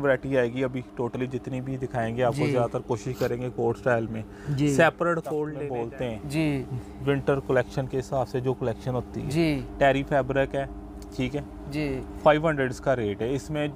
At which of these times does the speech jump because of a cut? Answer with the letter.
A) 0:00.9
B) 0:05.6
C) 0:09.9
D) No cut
B